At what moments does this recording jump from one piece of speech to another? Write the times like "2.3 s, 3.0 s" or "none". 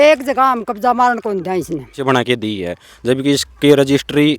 2.0 s